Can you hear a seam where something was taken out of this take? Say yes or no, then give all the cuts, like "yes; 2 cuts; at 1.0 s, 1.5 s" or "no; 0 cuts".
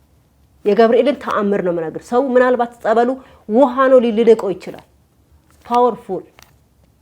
no; 0 cuts